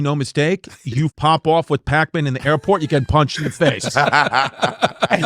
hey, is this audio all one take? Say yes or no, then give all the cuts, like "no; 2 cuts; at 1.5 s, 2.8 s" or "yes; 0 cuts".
no; 1 cut; at 1.1 s